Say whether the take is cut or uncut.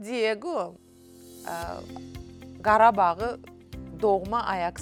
uncut